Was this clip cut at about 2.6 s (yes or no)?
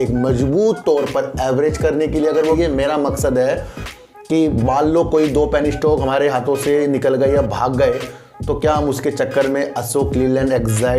yes